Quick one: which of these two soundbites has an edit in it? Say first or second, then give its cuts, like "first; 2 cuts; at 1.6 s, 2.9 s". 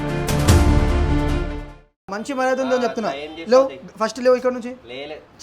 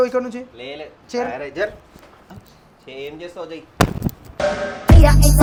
first; 1 cut; at 2.1 s